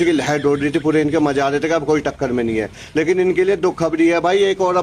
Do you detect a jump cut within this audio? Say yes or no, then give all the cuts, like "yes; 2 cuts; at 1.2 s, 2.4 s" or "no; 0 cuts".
no; 0 cuts